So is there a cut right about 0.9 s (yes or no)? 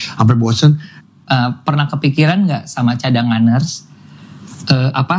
yes